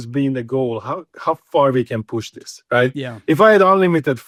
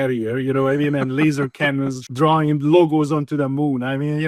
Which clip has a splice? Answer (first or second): second